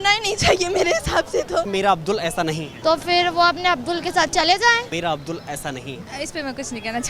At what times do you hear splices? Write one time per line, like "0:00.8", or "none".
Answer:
0:01.7
0:02.7
0:04.9
0:06.0